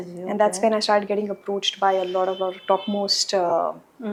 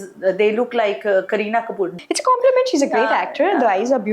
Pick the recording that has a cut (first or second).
second